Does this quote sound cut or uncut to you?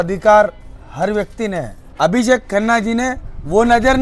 cut